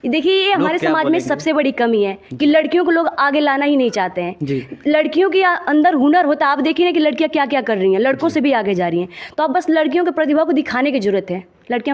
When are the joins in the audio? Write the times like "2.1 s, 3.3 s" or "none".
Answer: none